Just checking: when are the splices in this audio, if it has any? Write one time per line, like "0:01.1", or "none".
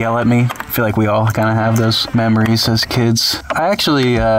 0:02.0
0:03.4